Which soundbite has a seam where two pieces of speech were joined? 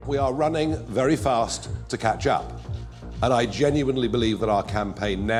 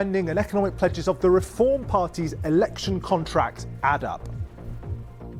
second; 1 cut; at 4.2 s

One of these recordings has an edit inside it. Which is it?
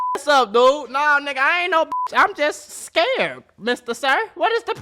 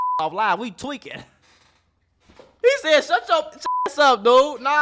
second; 1 cut; at 2.5 s

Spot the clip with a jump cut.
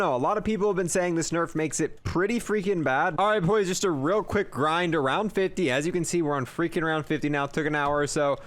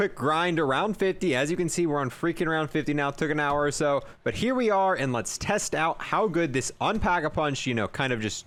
first; 1 cut; at 3.1 s

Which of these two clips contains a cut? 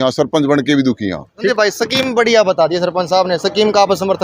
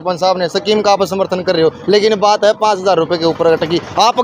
first; 1 cut; at 1.2 s

